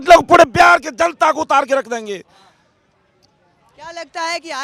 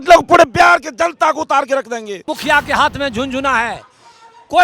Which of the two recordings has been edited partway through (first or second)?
second